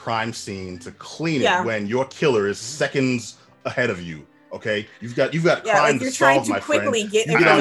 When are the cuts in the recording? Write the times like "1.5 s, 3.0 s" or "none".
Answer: none